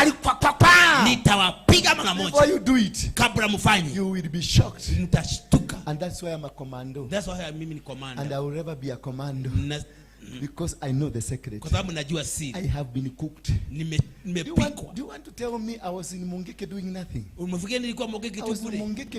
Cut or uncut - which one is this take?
uncut